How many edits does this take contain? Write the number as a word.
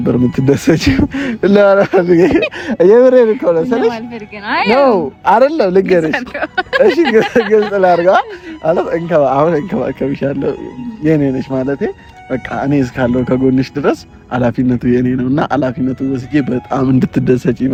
zero